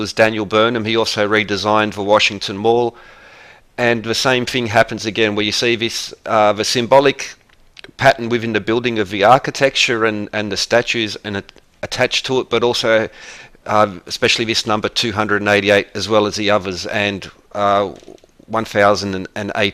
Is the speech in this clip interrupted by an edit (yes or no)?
no